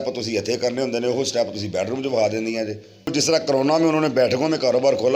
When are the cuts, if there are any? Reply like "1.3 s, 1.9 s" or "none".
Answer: 3.1 s